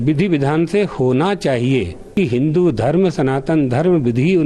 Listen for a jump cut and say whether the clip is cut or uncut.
cut